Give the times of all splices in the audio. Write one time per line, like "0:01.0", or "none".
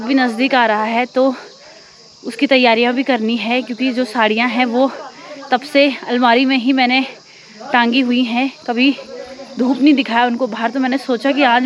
none